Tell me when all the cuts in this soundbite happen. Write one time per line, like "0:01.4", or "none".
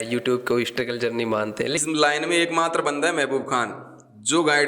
0:01.8